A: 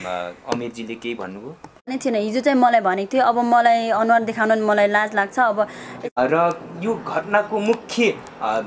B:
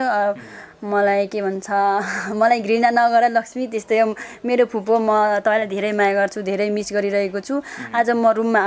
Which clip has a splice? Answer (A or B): A